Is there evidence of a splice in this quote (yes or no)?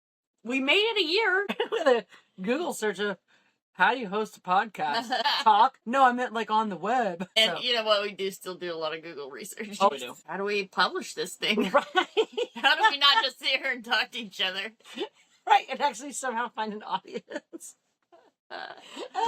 yes